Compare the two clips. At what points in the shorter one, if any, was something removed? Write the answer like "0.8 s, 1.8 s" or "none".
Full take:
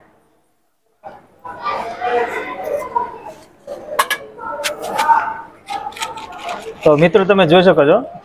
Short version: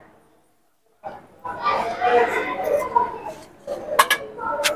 none

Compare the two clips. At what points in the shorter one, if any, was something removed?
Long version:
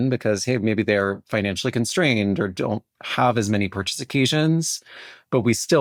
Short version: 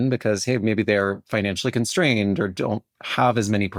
none

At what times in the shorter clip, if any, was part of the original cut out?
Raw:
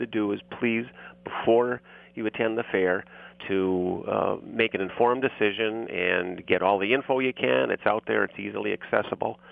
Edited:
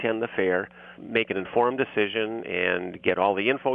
1.0 s

